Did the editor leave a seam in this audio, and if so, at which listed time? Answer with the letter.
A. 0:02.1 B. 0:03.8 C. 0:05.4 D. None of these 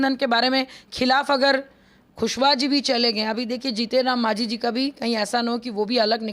A